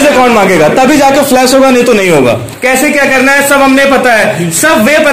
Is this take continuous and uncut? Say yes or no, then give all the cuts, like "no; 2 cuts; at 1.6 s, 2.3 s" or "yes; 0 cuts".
no; 1 cut; at 2.5 s